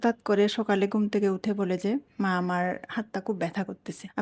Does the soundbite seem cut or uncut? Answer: uncut